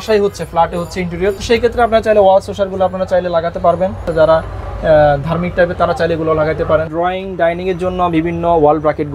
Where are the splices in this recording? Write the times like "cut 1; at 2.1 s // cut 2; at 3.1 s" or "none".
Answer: cut 1; at 1.4 s // cut 2; at 4.1 s // cut 3; at 6.8 s